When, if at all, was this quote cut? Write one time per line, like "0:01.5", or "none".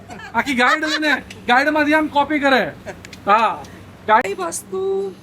0:04.2